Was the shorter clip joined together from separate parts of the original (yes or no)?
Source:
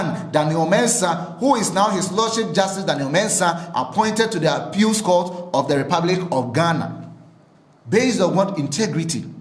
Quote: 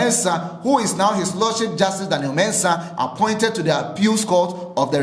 no